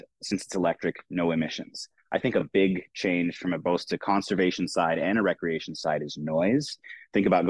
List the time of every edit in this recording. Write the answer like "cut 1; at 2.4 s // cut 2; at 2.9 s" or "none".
none